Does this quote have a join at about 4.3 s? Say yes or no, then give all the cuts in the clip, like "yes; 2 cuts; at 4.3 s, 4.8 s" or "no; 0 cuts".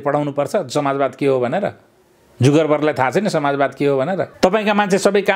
yes; 1 cut; at 4.3 s